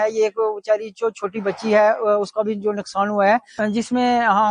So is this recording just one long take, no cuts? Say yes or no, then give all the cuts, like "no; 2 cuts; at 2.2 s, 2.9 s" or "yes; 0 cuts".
yes; 0 cuts